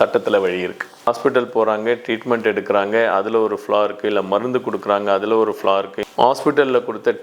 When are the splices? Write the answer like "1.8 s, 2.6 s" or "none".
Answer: 1.1 s, 6.0 s